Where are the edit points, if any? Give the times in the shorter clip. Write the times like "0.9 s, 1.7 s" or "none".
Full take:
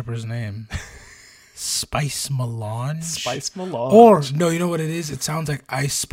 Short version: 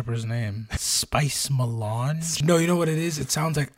0.9 s, 2.4 s